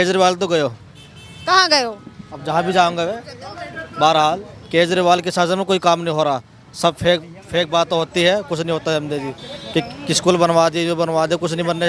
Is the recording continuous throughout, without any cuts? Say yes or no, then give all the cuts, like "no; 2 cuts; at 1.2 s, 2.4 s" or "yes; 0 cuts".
yes; 0 cuts